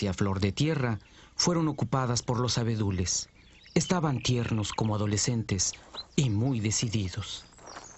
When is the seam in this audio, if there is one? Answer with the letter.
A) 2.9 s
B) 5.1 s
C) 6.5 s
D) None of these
C